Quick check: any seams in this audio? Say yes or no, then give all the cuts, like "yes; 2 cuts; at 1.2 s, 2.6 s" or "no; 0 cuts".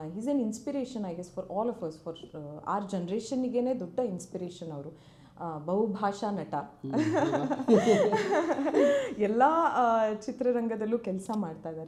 no; 0 cuts